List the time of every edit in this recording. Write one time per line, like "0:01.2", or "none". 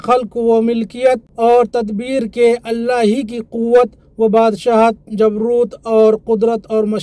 0:01.3